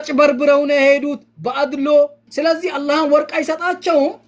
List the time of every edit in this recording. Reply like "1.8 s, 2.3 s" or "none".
2.2 s